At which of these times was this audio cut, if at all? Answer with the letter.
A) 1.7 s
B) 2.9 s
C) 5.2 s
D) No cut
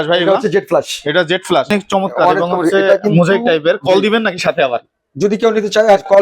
A